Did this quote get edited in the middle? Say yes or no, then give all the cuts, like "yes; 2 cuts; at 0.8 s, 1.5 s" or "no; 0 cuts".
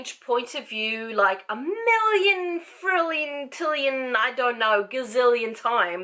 no; 0 cuts